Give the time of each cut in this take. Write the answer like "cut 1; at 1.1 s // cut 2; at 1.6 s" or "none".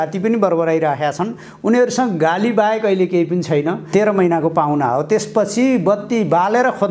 cut 1; at 3.9 s